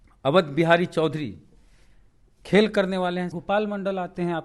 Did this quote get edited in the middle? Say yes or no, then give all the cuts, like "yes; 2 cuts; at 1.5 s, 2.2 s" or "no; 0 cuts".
yes; 1 cut; at 3.3 s